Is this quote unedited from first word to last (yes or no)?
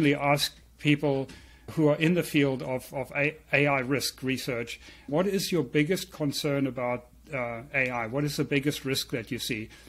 no